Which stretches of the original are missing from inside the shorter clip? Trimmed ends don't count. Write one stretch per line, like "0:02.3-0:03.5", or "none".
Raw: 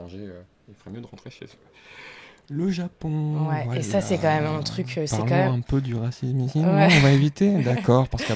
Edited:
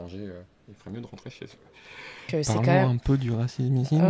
0:02.3-0:04.9